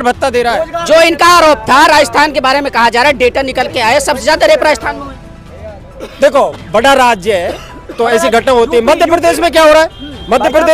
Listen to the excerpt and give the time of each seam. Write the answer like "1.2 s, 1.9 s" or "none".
none